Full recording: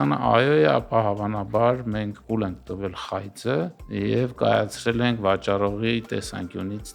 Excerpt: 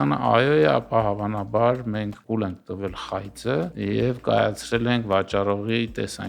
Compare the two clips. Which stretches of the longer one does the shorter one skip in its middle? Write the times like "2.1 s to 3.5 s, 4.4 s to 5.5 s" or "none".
3.7 s to 3.9 s